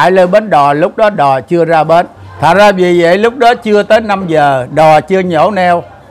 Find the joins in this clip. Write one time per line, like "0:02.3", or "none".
0:02.2